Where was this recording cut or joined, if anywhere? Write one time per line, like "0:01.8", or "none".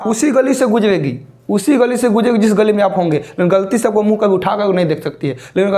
none